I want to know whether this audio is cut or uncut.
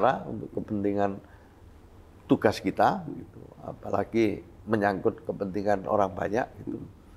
uncut